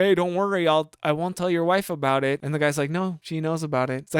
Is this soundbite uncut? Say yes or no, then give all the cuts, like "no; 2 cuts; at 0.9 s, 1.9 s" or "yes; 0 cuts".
no; 2 cuts; at 2.4 s, 3.4 s